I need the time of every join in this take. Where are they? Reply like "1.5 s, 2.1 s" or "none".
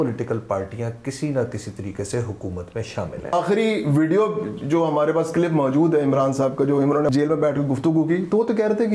3.3 s, 7.1 s